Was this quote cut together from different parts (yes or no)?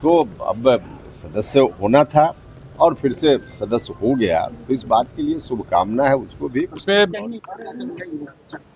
yes